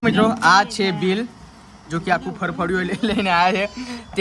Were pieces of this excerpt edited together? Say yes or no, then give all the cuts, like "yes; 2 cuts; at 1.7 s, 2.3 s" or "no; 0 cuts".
no; 0 cuts